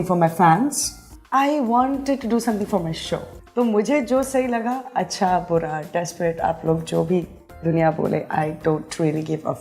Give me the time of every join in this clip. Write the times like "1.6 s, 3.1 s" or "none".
none